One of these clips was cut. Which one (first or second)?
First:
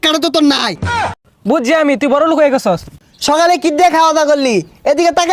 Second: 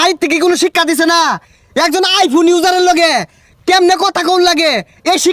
first